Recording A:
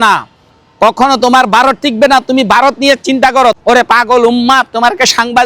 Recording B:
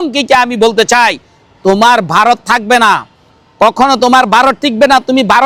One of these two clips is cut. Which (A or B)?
A